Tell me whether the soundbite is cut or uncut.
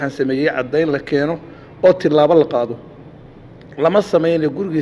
uncut